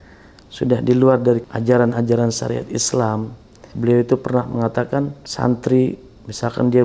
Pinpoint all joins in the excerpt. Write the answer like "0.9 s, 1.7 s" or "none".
1.5 s, 3.7 s, 5.2 s